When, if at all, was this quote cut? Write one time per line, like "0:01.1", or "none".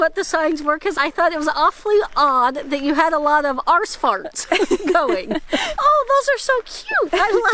0:00.9
0:05.7